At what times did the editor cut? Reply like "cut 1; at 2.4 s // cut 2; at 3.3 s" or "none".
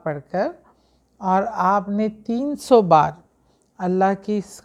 none

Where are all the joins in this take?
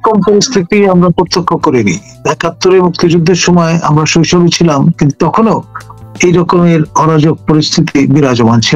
none

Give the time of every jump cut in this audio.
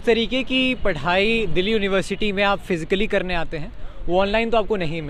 none

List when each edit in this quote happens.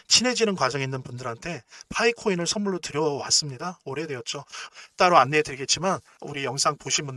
cut 1; at 6.2 s

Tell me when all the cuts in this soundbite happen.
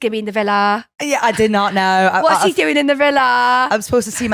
none

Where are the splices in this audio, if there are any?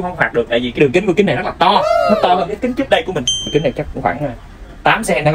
cut 1; at 0.8 s // cut 2; at 3.5 s

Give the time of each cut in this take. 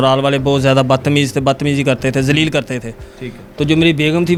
none

